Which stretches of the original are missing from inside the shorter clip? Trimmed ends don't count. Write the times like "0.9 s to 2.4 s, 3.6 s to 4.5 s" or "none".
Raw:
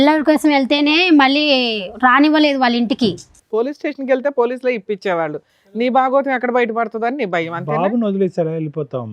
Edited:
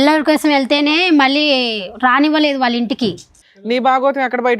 3.4 s to 5.4 s